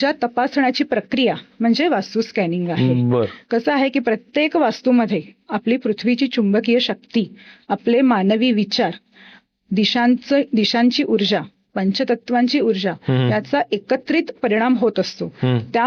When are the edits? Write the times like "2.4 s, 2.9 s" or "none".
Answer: none